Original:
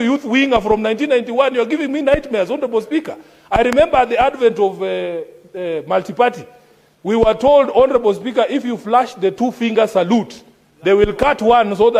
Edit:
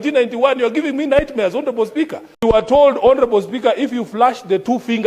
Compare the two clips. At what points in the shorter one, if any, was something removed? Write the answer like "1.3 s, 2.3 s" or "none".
2.4 s